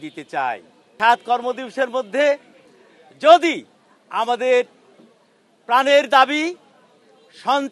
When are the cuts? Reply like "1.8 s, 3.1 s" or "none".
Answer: 0.9 s